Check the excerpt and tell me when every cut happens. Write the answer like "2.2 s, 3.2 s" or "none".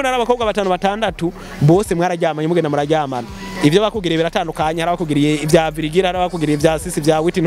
none